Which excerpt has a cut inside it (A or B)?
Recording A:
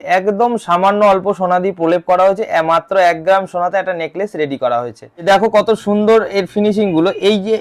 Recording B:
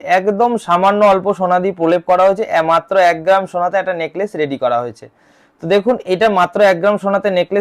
A